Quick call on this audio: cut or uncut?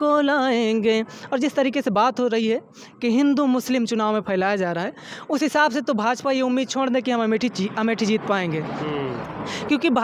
uncut